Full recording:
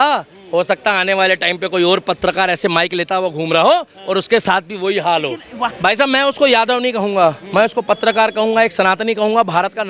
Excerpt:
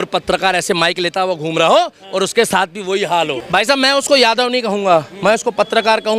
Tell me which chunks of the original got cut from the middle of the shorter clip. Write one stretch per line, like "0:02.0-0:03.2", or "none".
0:05.4-0:05.8